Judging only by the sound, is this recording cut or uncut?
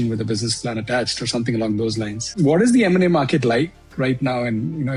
uncut